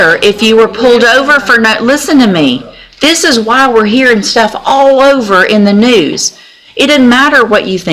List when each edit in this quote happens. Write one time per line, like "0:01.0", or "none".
none